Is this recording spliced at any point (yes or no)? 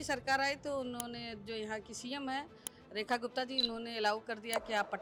no